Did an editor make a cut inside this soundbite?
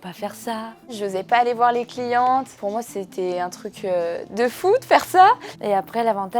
yes; 3 cuts; at 1.0 s, 2.5 s, 5.5 s

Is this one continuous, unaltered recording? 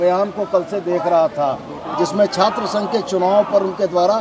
yes; 0 cuts

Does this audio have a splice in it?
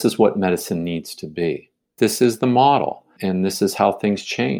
yes; 2 cuts; at 1.9 s, 3.1 s

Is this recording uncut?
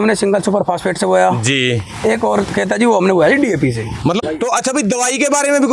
no; 1 cut; at 4.2 s

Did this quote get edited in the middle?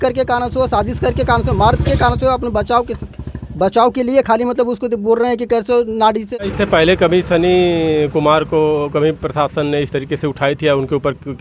yes; 1 cut; at 6.3 s

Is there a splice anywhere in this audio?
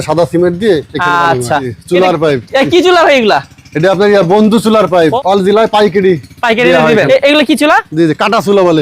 yes; 3 cuts; at 1.7 s, 5.2 s, 6.9 s

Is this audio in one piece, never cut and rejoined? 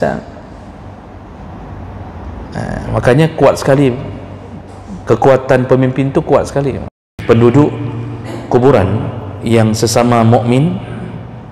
no; 1 cut; at 7.1 s

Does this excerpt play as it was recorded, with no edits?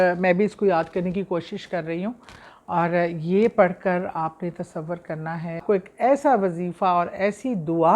no; 1 cut; at 5.6 s

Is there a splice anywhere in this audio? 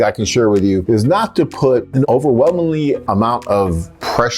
yes; 3 cuts; at 0.8 s, 2.0 s, 3.0 s

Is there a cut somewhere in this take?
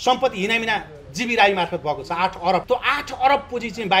yes; 1 cut; at 2.6 s

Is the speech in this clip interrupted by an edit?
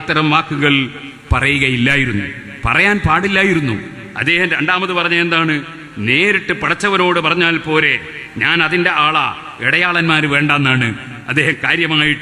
no; 0 cuts

